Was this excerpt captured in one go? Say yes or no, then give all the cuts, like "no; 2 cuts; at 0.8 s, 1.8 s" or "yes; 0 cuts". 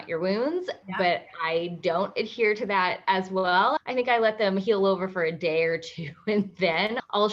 yes; 0 cuts